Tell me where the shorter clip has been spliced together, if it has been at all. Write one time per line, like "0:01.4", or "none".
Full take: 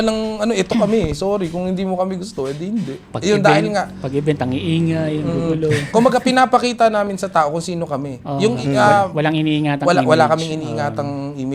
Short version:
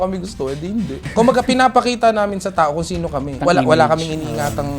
0:01.1
0:03.4